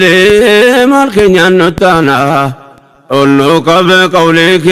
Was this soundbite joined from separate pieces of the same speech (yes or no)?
no